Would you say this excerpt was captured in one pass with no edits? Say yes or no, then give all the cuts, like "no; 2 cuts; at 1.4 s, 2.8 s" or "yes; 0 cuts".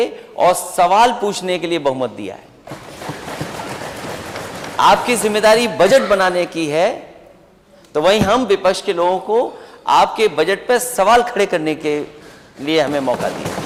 yes; 0 cuts